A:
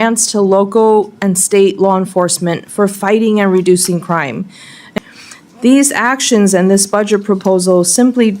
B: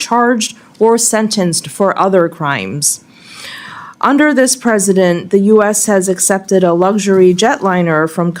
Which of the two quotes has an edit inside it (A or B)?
A